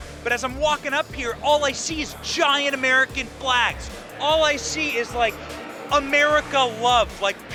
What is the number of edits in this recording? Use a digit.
0